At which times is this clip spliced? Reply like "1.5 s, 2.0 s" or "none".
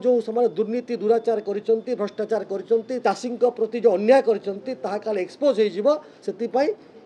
2.9 s